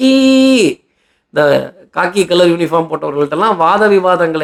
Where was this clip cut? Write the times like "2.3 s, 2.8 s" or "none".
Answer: none

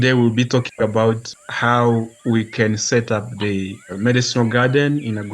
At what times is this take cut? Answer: 1.3 s, 2.1 s, 3.9 s

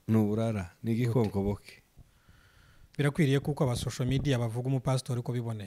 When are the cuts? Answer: 1.9 s

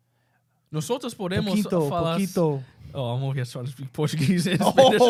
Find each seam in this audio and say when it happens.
none

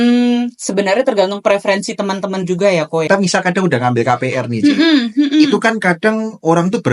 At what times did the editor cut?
3.1 s

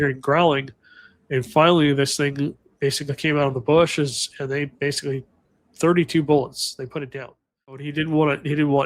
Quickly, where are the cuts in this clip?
7.9 s

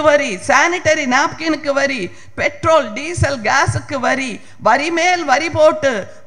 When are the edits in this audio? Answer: none

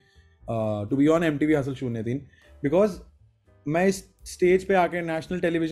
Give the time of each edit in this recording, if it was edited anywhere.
none

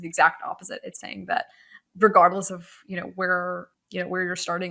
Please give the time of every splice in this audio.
3.7 s

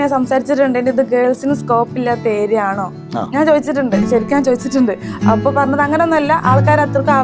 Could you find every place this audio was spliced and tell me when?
none

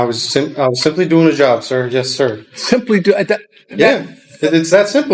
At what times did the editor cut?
none

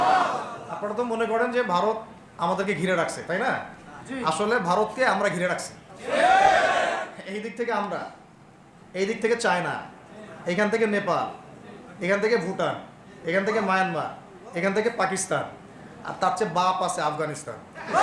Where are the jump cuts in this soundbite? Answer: none

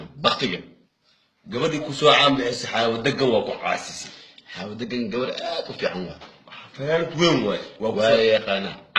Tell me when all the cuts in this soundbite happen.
3.2 s

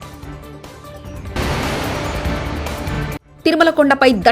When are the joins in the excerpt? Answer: 1.0 s

